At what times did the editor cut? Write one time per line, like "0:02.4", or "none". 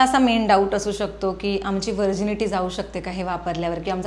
none